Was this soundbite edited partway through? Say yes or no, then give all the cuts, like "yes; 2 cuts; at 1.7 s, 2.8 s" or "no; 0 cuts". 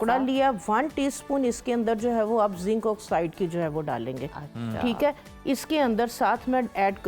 no; 0 cuts